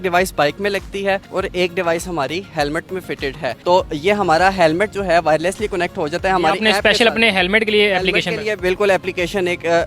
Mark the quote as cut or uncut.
uncut